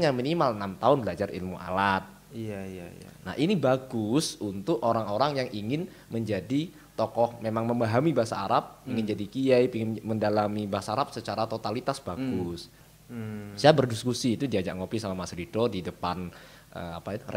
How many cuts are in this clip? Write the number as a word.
one